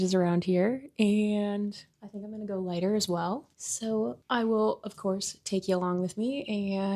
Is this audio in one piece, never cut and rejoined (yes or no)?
yes